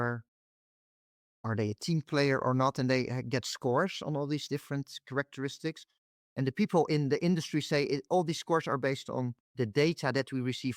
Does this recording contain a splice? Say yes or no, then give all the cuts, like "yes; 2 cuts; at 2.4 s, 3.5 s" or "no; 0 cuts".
yes; 1 cut; at 9.4 s